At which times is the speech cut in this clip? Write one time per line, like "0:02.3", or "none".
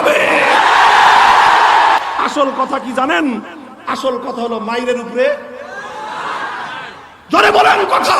0:02.1